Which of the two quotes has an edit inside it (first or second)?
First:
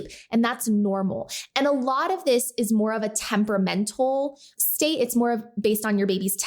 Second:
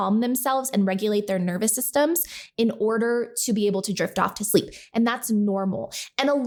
first